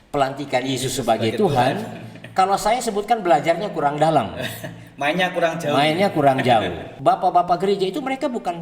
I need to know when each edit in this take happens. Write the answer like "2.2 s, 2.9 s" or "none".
6.9 s